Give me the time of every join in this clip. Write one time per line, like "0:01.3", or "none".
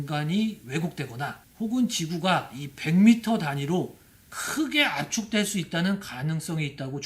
0:01.4